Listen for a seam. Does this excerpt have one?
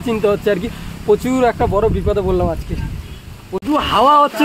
yes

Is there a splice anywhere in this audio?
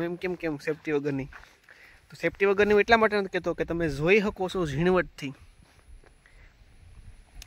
no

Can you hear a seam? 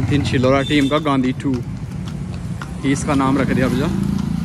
no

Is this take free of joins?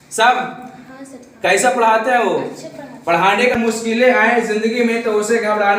no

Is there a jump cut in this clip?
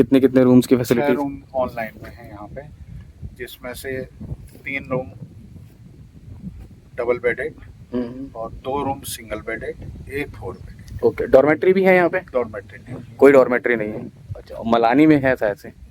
no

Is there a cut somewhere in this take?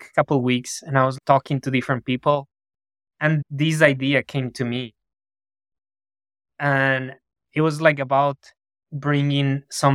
yes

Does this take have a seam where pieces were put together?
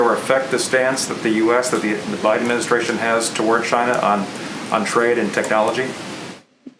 no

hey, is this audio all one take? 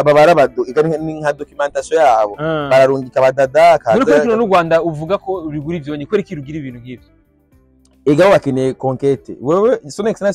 yes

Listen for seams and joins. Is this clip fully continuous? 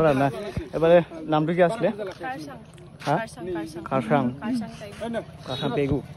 yes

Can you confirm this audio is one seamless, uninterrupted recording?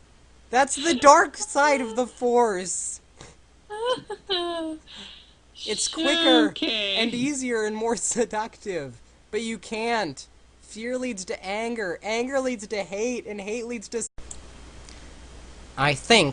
yes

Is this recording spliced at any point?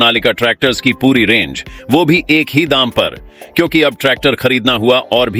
no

